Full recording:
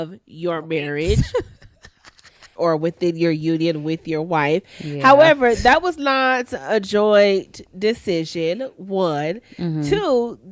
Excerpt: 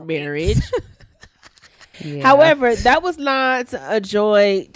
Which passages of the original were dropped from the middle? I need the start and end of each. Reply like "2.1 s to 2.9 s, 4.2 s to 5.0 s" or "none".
2.5 s to 4.7 s